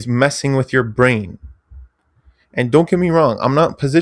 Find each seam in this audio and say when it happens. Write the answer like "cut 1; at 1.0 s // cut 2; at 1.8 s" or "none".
none